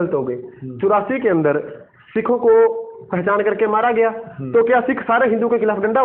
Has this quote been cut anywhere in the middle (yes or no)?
no